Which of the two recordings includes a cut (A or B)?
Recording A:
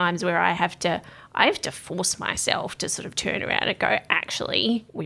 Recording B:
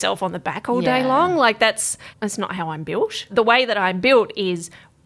B